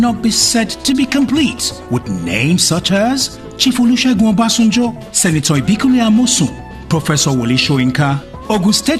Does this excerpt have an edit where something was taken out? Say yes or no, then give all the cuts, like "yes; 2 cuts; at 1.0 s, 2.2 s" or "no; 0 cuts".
no; 0 cuts